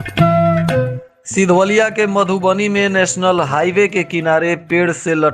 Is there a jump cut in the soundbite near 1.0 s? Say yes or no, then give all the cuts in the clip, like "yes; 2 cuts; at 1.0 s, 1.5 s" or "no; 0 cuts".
yes; 1 cut; at 1.0 s